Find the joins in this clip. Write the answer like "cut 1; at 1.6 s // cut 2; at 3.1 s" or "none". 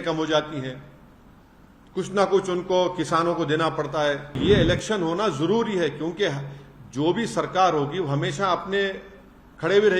cut 1; at 4.4 s